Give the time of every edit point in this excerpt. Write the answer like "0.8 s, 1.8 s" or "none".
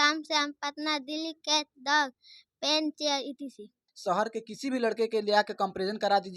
3.9 s